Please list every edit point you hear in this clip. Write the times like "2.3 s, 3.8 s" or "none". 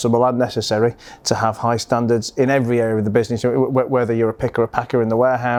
none

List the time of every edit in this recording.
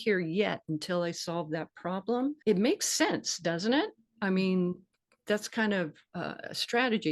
2.4 s, 6.0 s

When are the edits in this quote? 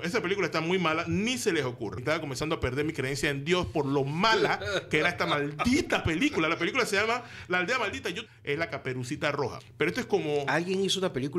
2.0 s, 8.2 s, 9.6 s

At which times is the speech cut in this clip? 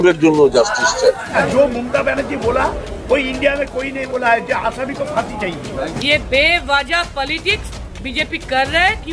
1.3 s, 5.9 s

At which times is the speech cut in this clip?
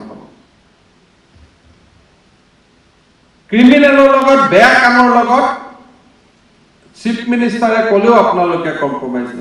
none

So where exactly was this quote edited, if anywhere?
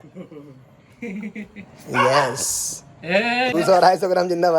3.5 s

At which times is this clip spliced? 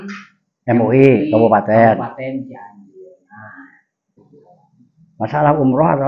4.3 s

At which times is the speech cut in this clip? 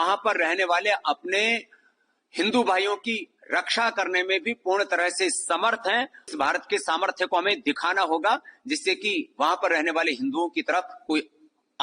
6.3 s

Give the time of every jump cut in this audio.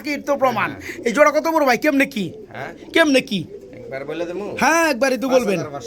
none

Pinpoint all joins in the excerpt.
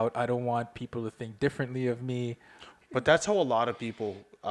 2.7 s

